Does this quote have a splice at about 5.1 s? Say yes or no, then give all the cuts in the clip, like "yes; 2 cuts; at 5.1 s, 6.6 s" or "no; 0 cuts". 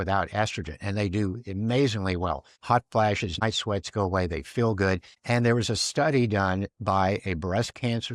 yes; 3 cuts; at 2.5 s, 3.4 s, 5.1 s